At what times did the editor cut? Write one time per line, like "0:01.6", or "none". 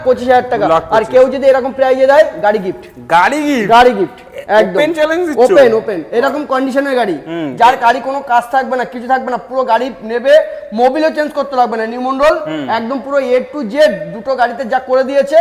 none